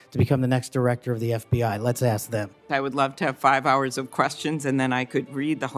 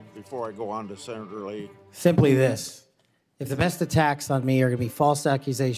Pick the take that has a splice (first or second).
first